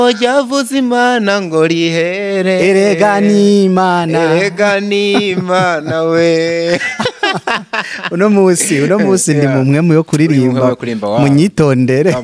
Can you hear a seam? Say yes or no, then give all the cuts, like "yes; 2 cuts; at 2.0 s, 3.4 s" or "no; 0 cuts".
no; 0 cuts